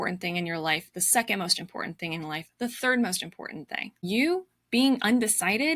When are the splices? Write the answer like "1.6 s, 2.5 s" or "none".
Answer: 3.9 s